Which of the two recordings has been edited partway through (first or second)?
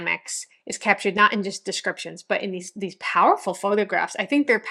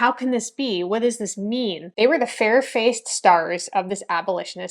second